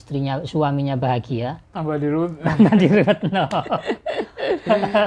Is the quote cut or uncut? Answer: uncut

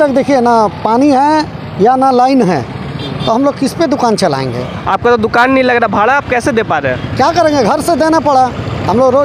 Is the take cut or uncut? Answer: cut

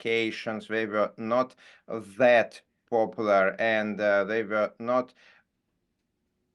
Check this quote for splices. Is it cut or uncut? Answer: uncut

